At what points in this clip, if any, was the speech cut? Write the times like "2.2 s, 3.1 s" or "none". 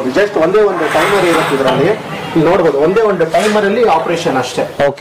none

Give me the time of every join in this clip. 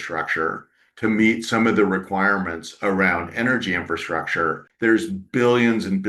4.7 s

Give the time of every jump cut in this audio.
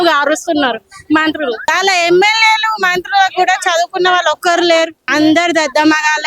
1.7 s, 5.0 s

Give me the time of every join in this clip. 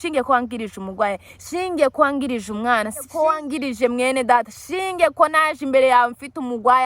3.1 s

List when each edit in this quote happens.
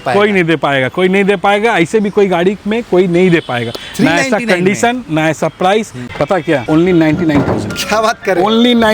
6.0 s

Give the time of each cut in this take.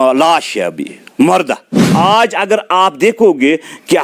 1.8 s

